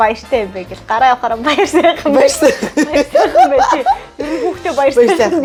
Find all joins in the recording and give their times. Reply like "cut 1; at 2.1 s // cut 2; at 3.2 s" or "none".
none